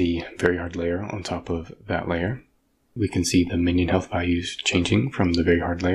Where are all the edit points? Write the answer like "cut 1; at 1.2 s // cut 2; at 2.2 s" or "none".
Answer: cut 1; at 3.0 s

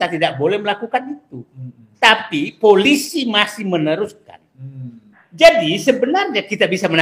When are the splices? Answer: cut 1; at 5.2 s

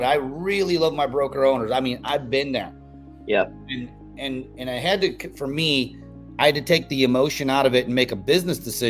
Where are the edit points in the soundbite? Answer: none

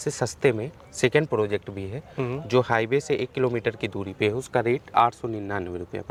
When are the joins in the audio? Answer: none

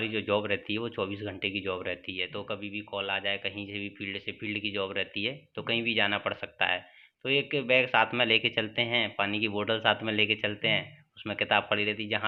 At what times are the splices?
none

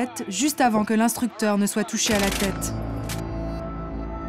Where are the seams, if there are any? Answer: none

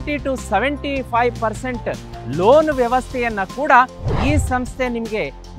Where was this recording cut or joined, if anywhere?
none

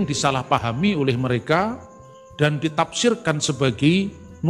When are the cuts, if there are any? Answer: none

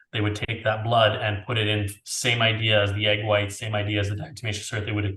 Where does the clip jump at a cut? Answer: none

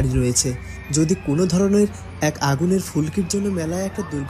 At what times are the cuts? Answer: none

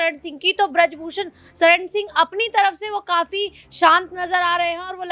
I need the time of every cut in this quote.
none

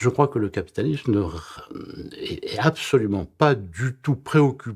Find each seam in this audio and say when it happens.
none

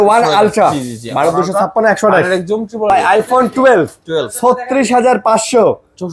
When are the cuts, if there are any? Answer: cut 1; at 2.9 s

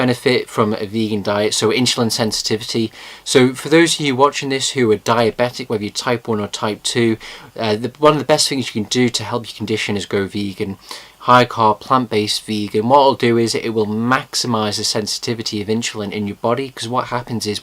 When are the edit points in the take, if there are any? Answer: cut 1; at 2.4 s

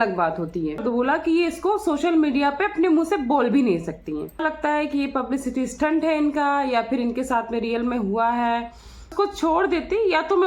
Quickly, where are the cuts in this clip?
cut 1; at 0.8 s // cut 2; at 4.4 s // cut 3; at 9.1 s

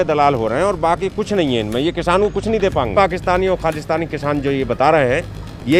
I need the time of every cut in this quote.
cut 1; at 2.9 s

